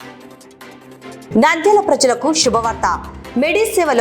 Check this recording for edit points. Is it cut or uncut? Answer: cut